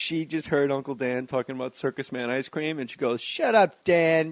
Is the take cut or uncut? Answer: cut